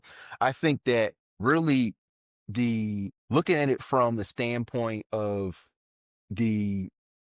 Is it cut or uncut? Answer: cut